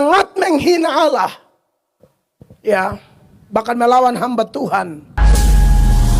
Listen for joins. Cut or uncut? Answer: cut